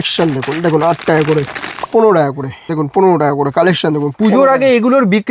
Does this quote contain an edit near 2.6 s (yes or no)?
yes